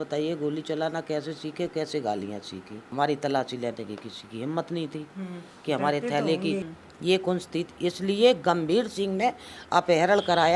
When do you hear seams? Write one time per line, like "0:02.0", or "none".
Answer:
0:02.9
0:06.8